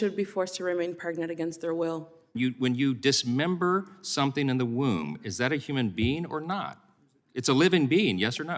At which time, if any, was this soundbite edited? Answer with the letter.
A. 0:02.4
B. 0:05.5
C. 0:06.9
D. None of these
A